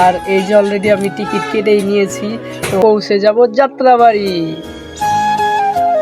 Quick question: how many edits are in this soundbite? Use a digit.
1